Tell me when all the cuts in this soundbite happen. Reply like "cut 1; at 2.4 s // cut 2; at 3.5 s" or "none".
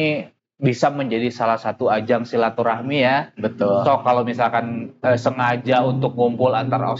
none